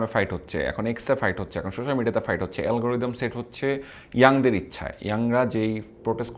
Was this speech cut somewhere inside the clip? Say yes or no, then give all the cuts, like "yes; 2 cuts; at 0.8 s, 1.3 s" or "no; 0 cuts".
no; 0 cuts